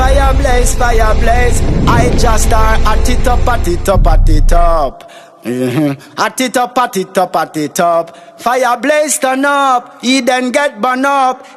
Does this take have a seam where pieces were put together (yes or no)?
no